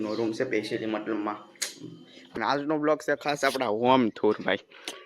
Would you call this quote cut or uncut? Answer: cut